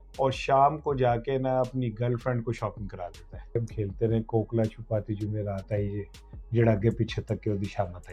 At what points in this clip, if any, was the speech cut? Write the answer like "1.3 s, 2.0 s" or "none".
3.6 s